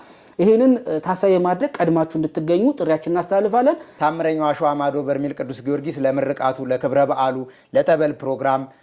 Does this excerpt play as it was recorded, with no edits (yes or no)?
no